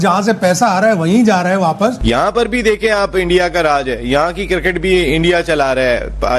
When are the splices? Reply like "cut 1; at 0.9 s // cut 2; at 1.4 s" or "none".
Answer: none